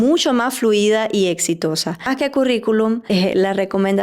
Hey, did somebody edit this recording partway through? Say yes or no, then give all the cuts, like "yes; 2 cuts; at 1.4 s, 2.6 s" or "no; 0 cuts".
yes; 2 cuts; at 2.1 s, 3.0 s